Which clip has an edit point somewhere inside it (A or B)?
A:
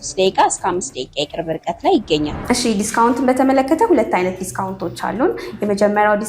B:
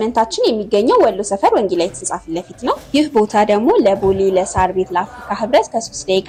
A